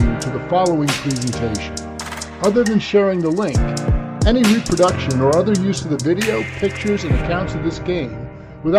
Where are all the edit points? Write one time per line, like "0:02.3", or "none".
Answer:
none